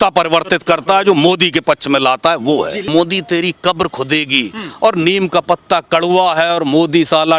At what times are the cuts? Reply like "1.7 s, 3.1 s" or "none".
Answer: 2.9 s

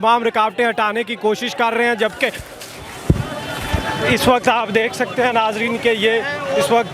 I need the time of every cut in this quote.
none

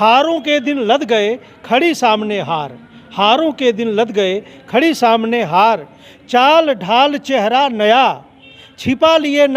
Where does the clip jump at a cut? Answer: none

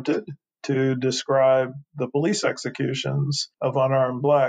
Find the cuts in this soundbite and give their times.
3.4 s

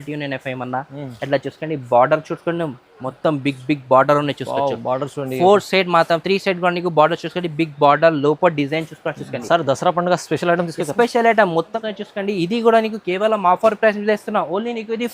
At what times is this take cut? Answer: 11.8 s

